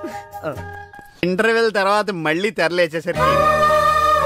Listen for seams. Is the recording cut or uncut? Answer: cut